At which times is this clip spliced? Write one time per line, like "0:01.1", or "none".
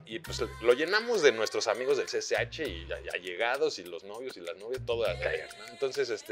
none